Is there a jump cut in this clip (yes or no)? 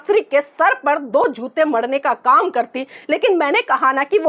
no